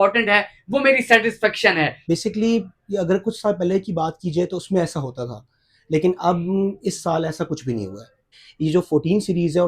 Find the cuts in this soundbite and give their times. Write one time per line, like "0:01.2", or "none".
0:02.0
0:08.4